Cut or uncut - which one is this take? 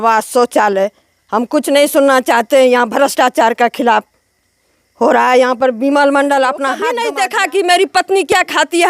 cut